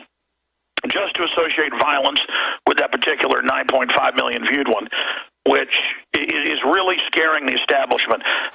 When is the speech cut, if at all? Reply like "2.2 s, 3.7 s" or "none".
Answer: none